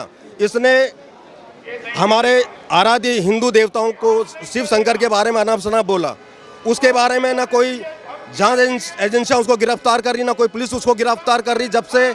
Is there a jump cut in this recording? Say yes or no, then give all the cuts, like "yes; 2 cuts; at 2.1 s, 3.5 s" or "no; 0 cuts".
no; 0 cuts